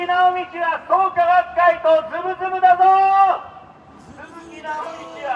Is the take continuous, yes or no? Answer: yes